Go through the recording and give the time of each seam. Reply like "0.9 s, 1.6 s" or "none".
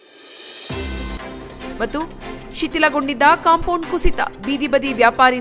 1.3 s